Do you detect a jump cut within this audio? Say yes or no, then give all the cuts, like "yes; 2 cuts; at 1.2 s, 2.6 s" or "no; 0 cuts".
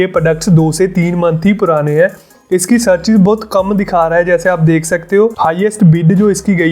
yes; 2 cuts; at 2.4 s, 5.4 s